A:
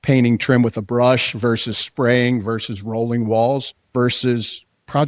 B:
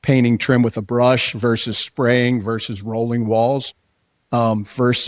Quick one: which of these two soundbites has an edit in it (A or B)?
A